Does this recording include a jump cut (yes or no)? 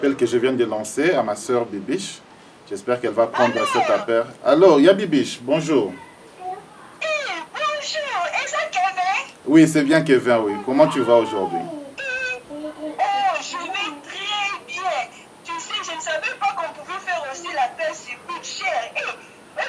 no